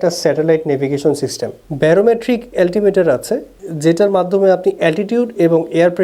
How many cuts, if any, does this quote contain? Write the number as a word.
zero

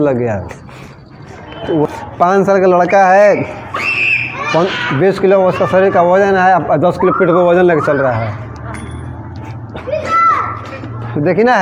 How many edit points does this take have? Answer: one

